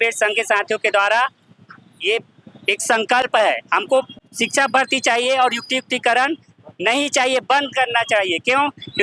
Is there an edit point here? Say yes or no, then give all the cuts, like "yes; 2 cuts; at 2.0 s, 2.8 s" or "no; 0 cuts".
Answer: no; 0 cuts